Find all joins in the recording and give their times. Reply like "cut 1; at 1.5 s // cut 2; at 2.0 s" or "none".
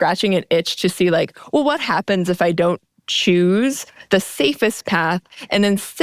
none